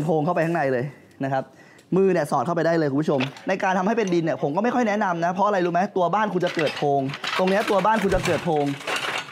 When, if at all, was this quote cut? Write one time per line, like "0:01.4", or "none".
0:03.3
0:07.2

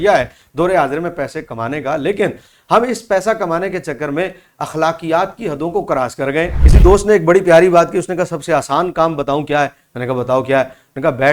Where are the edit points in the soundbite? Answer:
0:06.6

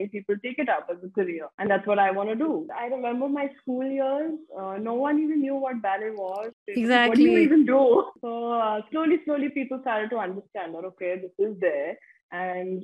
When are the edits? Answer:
0:02.7
0:08.2

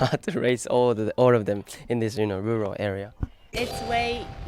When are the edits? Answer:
0:03.5

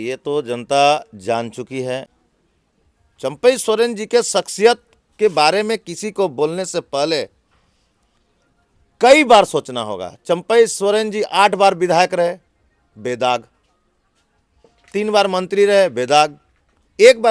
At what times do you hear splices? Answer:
0:02.2

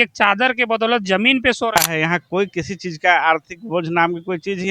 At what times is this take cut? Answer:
0:01.8

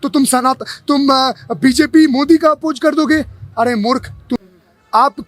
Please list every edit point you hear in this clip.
0:04.3

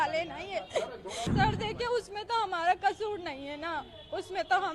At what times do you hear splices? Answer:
0:01.3

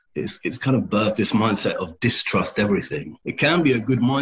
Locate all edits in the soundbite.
0:03.1

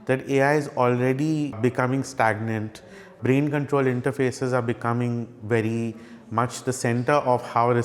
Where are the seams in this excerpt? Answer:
0:01.6
0:03.1

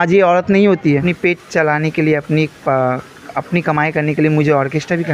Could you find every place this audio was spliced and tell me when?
0:01.0

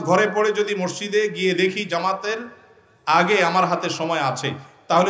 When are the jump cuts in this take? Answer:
none

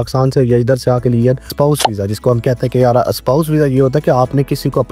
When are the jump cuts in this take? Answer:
0:01.5

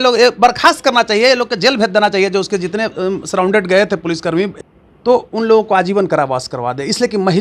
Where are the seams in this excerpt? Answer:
0:04.5

